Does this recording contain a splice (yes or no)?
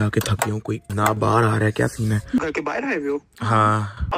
yes